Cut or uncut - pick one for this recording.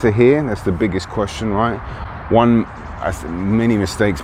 uncut